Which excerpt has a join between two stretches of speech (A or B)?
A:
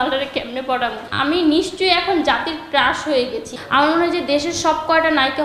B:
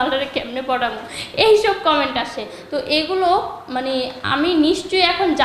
A